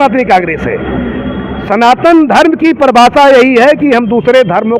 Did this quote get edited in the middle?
no; 0 cuts

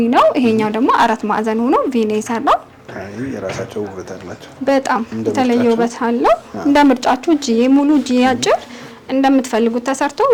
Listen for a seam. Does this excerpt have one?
no; 0 cuts

